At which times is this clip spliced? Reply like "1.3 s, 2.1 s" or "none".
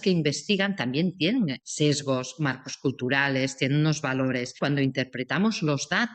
1.6 s, 4.6 s